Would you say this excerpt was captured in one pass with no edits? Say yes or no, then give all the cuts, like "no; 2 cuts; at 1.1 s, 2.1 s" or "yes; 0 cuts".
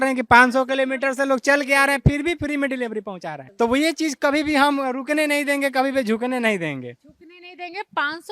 yes; 0 cuts